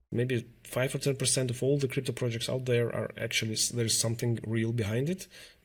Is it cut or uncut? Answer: uncut